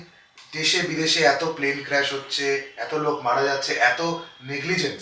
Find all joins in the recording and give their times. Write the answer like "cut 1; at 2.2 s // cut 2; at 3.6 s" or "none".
none